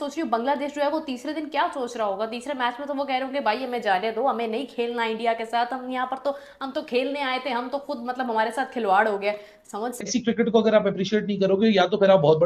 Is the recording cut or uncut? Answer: cut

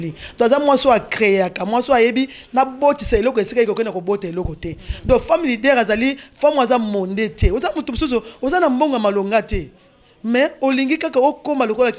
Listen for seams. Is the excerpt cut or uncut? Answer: uncut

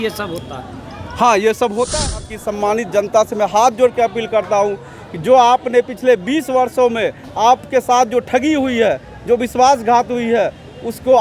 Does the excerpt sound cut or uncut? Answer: cut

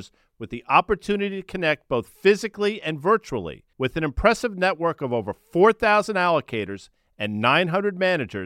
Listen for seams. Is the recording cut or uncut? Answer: uncut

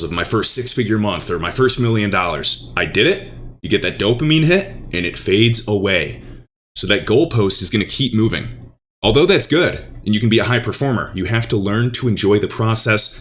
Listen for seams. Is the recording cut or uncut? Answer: uncut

